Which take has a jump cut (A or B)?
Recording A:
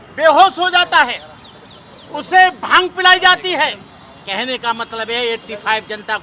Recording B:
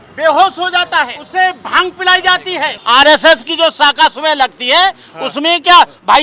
B